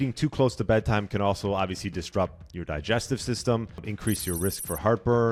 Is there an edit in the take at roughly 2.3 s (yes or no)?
no